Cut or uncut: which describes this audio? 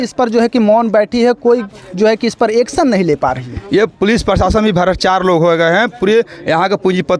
uncut